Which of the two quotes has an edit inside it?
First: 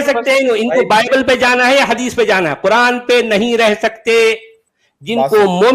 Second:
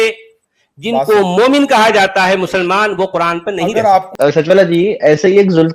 second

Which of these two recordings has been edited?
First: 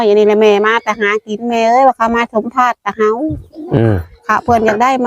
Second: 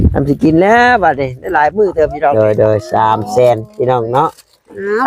second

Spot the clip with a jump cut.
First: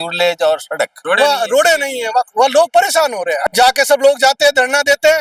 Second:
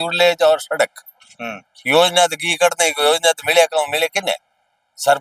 first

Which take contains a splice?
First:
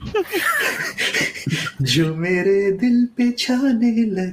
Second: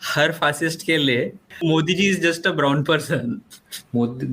second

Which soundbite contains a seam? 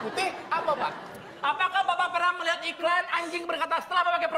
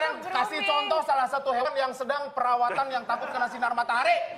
second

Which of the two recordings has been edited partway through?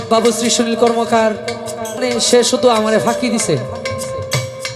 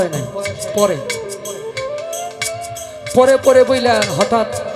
first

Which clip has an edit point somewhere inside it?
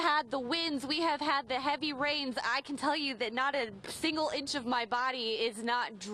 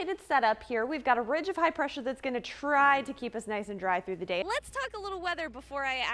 second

